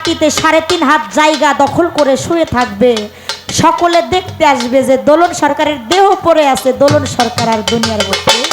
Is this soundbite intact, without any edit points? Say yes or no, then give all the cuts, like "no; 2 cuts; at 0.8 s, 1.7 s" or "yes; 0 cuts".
yes; 0 cuts